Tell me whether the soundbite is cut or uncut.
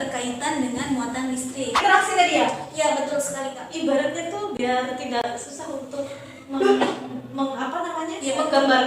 cut